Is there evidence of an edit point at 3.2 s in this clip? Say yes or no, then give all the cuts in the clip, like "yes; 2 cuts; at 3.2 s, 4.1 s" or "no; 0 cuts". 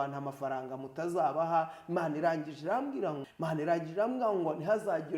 yes; 1 cut; at 3.2 s